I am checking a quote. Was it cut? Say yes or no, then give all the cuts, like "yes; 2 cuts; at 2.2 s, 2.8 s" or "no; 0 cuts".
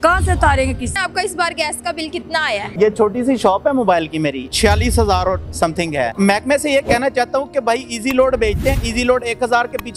yes; 4 cuts; at 0.9 s, 2.8 s, 4.5 s, 6.1 s